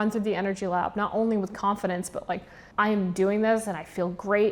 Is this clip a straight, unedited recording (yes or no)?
no